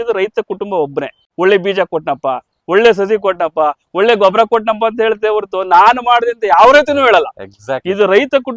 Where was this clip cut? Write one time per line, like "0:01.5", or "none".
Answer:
0:01.2

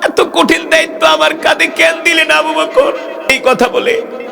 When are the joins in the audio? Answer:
0:03.4

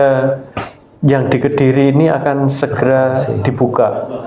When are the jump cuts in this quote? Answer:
none

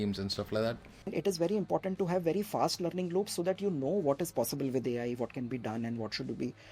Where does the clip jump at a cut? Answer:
0:01.1

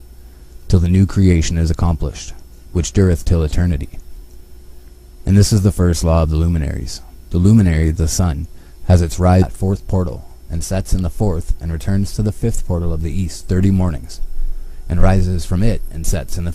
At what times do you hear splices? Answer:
none

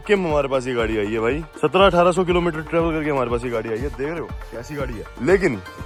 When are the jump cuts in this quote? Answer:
none

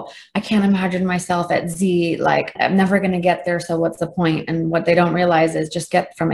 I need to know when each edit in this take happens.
0:02.6

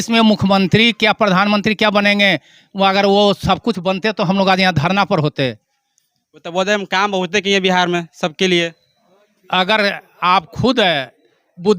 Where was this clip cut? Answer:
none

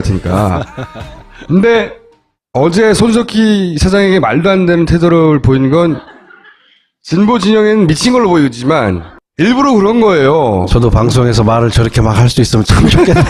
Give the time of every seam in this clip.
none

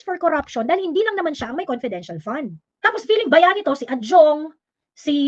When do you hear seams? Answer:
0:02.6

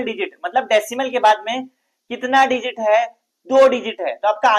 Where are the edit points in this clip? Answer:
none

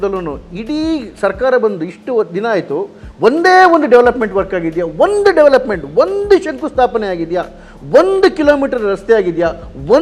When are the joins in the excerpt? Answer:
none

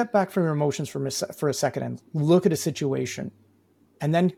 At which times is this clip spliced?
none

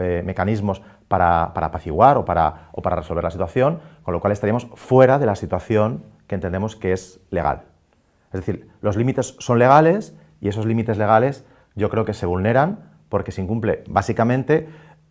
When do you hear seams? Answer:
0:06.5

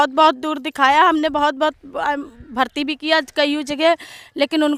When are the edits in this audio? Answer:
none

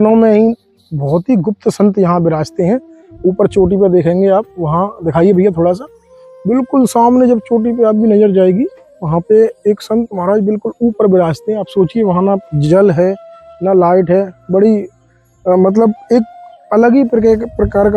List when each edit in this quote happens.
none

